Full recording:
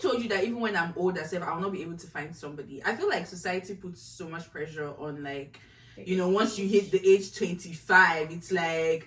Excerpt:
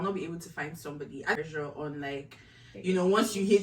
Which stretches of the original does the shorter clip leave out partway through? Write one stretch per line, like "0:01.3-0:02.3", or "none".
0:02.9-0:04.6